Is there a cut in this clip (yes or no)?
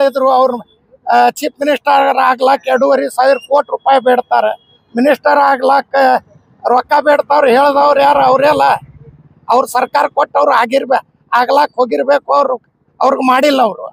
no